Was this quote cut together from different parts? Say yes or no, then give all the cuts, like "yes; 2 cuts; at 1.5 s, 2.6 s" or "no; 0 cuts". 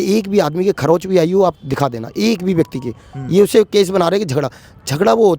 no; 0 cuts